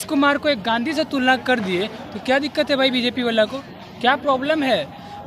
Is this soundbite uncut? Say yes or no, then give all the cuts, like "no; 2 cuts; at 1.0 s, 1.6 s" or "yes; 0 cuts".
yes; 0 cuts